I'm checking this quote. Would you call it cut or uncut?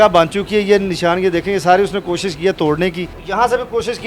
cut